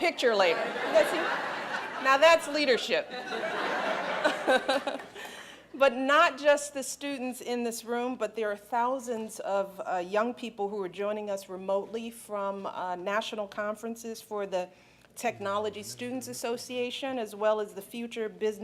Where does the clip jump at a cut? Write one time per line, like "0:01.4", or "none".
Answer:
0:11.5